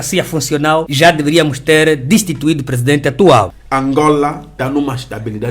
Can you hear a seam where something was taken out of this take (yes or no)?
yes